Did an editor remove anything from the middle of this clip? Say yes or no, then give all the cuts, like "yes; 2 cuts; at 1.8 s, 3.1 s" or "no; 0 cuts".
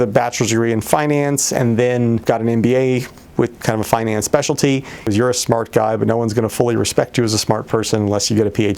yes; 2 cuts; at 2.2 s, 5.1 s